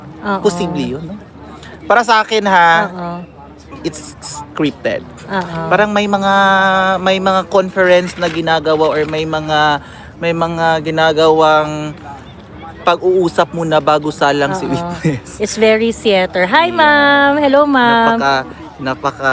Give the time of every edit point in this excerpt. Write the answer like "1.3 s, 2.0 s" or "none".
none